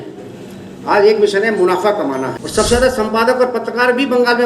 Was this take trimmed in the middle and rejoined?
yes; 1 cut; at 2.4 s

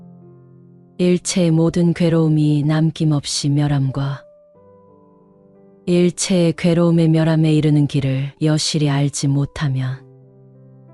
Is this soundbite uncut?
yes; 0 cuts

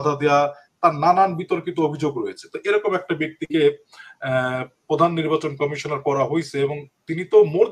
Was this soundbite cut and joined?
no; 0 cuts

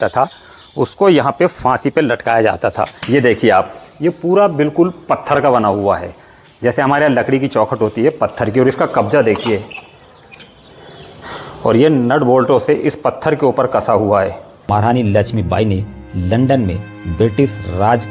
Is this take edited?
yes; 2 cuts; at 2.9 s, 14.6 s

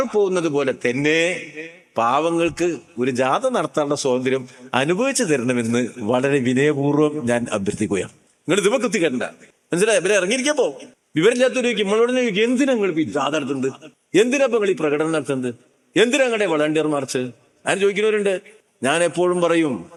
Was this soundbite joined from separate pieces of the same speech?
no; 0 cuts

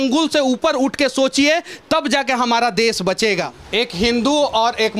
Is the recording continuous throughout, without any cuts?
no; 1 cut; at 3.6 s

